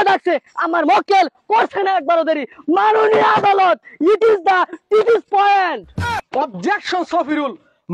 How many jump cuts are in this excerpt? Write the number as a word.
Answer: one